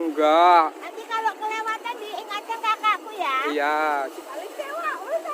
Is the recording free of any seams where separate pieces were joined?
no; 1 cut; at 4.1 s

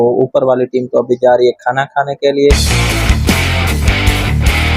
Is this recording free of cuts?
no; 1 cut; at 2.7 s

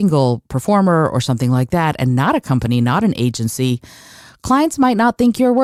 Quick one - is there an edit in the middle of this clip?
no; 0 cuts

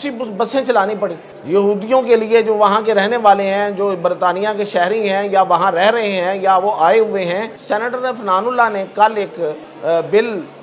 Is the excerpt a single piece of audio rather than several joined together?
no; 3 cuts; at 1.3 s, 7.5 s, 9.7 s

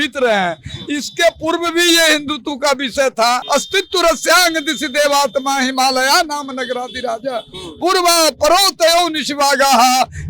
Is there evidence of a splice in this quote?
yes; 1 cut; at 3.4 s

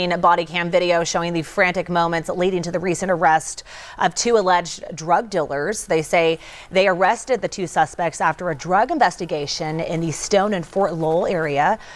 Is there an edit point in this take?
no; 0 cuts

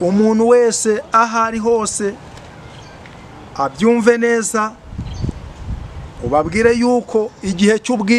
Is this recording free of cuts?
yes; 0 cuts

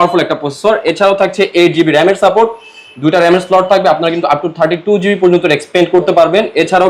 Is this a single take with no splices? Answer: yes; 0 cuts

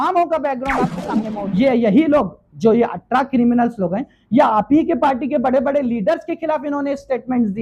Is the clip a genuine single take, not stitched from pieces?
no; 1 cut; at 1.3 s

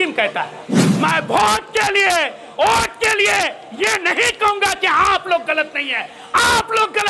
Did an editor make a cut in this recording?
yes; 1 cut; at 1.0 s

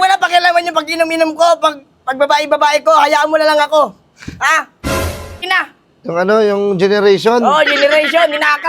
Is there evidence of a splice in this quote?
yes; 1 cut; at 5.4 s

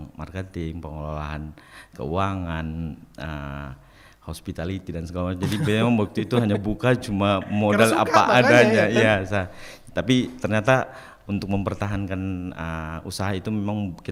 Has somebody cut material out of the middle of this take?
no; 0 cuts

